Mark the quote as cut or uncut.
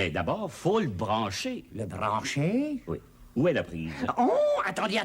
uncut